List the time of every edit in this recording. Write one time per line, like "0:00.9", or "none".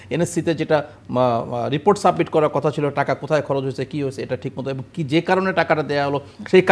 none

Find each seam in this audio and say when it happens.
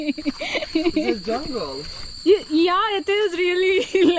none

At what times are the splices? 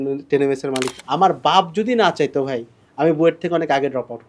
0:01.0

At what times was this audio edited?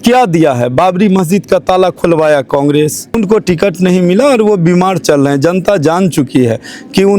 0:03.2

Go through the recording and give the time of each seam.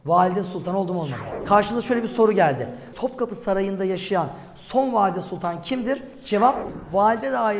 0:01.3
0:02.8
0:06.7

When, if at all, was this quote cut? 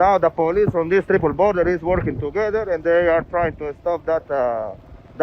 none

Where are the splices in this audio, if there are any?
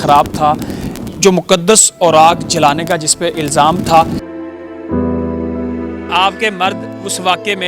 0:04.2
0:06.1

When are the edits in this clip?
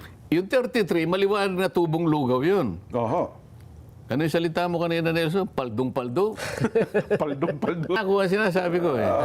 0:08.0

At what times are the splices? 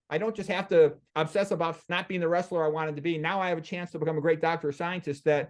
0:01.9

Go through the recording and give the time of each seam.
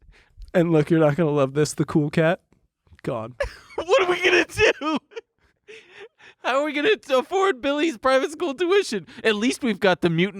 0:03.3

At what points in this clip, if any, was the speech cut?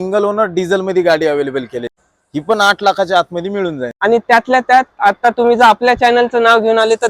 0:02.0
0:03.8

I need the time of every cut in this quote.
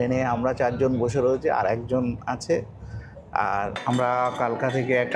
0:03.8

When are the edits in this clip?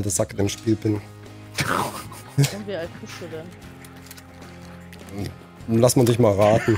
none

